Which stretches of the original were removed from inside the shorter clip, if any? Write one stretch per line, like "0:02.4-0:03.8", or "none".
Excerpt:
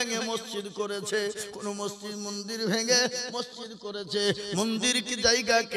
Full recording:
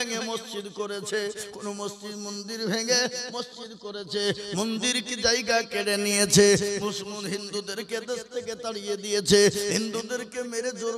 none